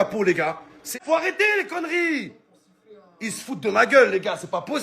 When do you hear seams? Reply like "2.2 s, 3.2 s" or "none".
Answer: 1.0 s